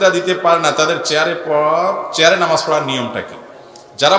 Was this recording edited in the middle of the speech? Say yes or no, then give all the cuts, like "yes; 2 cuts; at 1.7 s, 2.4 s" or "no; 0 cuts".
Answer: no; 0 cuts